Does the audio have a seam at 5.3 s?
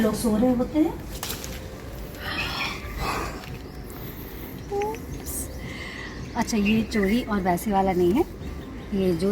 no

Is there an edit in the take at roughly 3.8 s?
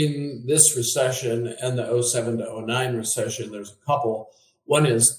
no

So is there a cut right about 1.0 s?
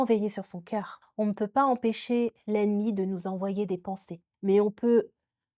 yes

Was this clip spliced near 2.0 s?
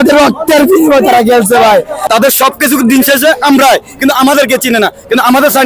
yes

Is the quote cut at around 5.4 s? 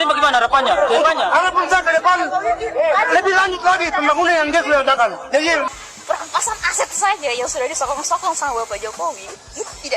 yes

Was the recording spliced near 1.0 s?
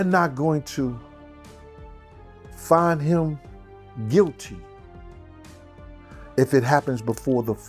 no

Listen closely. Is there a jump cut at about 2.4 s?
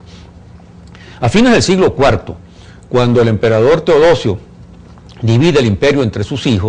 yes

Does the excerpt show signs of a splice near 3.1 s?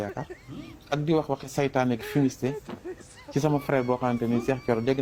no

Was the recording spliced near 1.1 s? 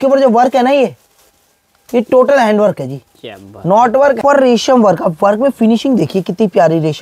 no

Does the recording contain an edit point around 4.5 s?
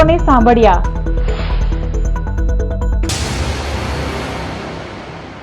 no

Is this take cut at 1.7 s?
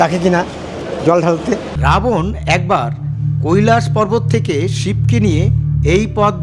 yes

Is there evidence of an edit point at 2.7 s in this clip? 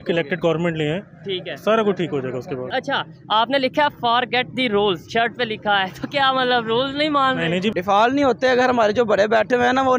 yes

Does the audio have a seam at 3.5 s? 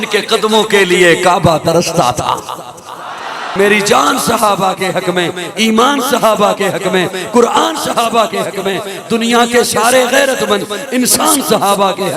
yes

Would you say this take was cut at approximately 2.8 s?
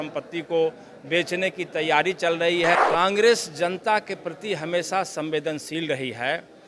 yes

